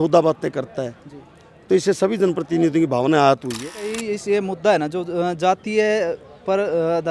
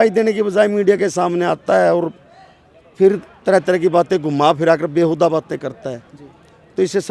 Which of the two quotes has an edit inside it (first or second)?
first